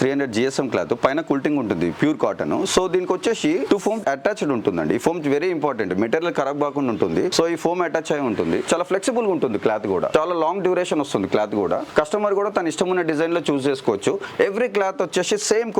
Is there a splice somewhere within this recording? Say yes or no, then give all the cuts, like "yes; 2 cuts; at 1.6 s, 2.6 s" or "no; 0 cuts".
no; 0 cuts